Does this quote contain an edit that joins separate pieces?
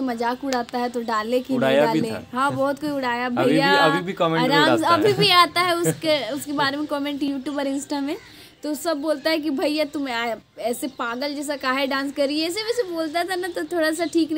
no; 0 cuts

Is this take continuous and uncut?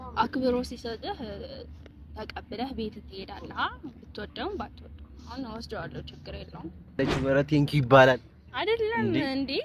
no; 1 cut; at 7.1 s

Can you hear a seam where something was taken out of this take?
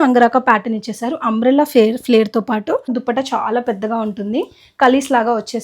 yes; 1 cut; at 2.9 s

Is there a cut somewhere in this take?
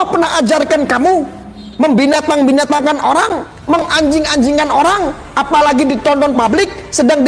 no; 0 cuts

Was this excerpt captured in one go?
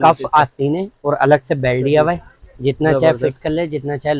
yes; 0 cuts

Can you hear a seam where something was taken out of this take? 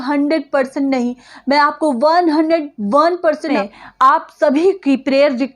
yes; 1 cut; at 3.6 s

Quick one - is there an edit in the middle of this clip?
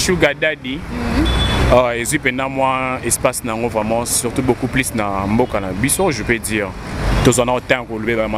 no; 0 cuts

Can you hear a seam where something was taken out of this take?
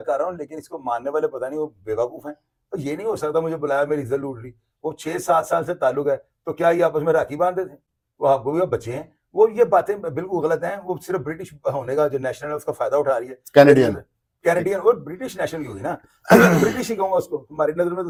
no; 0 cuts

